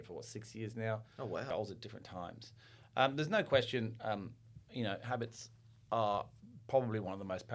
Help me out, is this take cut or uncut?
cut